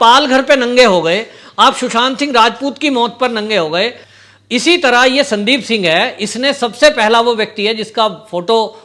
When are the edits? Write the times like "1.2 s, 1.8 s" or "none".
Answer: 4.0 s